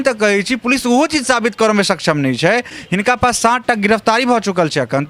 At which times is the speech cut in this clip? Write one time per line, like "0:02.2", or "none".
0:02.7